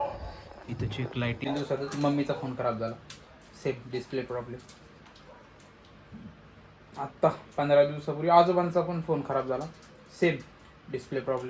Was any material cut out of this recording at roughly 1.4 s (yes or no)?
yes